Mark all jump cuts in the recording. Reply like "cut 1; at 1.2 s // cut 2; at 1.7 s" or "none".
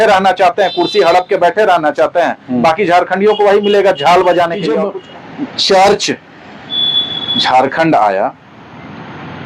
cut 1; at 4.7 s